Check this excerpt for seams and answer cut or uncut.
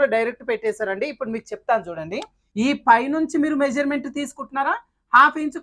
cut